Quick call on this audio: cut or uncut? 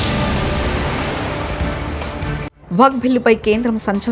cut